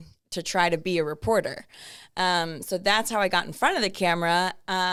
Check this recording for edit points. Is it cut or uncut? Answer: uncut